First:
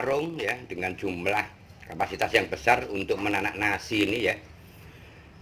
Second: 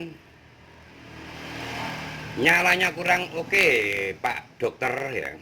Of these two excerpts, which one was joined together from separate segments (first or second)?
second